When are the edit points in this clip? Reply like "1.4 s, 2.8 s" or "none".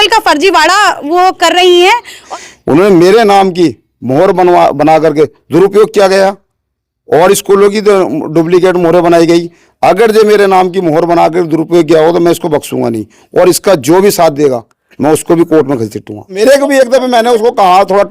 2.2 s, 16.4 s

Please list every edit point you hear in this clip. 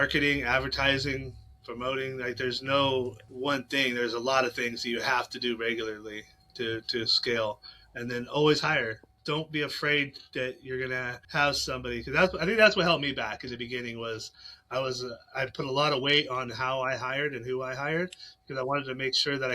3.2 s, 9.1 s, 11.2 s

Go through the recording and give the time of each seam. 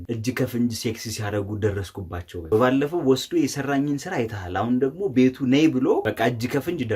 2.5 s

